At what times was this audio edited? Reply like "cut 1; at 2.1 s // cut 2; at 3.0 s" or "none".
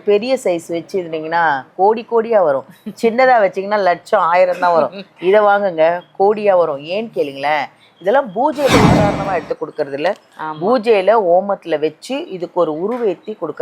cut 1; at 9.0 s